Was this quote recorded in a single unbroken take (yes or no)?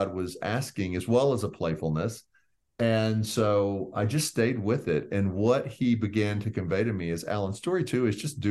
yes